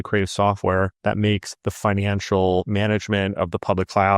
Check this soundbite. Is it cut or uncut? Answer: cut